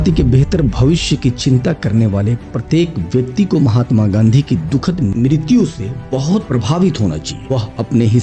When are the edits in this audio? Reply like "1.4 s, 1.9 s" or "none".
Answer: none